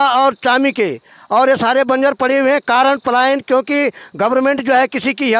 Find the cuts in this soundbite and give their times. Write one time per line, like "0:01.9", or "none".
none